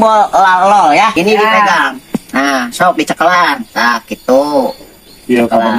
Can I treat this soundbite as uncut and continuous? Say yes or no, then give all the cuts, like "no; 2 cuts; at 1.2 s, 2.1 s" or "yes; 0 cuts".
no; 1 cut; at 1.1 s